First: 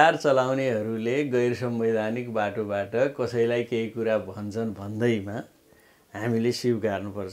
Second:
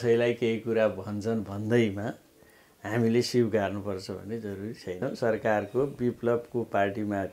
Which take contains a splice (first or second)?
second